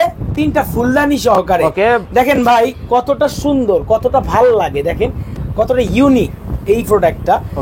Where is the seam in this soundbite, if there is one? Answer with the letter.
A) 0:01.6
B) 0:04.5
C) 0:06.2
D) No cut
D